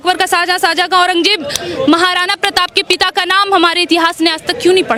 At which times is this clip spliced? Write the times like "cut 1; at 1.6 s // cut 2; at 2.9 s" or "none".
none